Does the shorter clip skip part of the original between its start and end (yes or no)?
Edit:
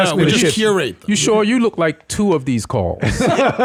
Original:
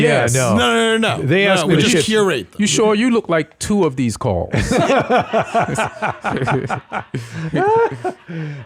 no